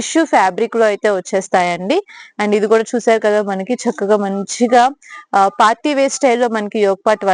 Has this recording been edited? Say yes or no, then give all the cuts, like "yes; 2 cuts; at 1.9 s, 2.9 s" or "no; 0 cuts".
no; 0 cuts